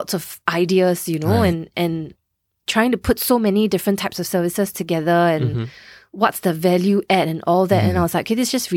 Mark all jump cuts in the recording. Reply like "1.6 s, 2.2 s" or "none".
none